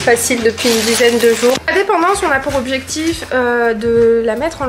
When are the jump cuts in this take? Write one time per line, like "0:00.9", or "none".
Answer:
0:01.6